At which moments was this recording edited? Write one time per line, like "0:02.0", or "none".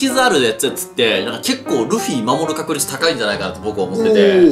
none